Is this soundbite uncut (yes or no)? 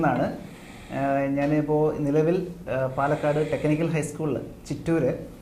yes